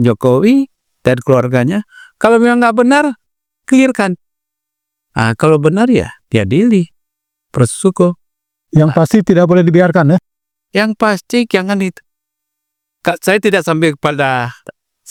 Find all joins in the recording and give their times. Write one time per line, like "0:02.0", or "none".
none